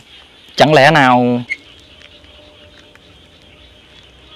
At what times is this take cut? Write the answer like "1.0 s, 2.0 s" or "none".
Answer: 1.5 s